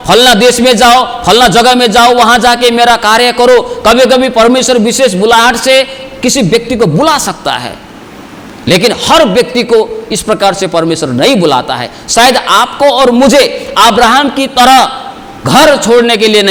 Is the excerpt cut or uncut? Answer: uncut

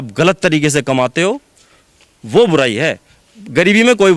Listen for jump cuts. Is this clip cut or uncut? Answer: uncut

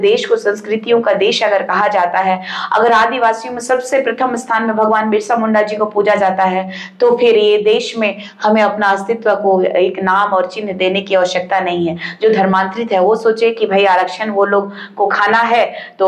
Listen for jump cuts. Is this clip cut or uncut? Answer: uncut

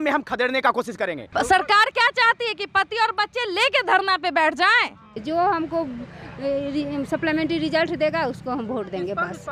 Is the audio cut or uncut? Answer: cut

